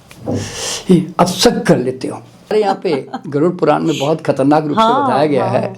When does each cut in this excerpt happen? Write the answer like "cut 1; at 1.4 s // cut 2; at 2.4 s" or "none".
cut 1; at 2.5 s